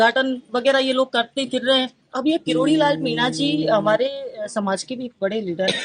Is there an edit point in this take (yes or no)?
yes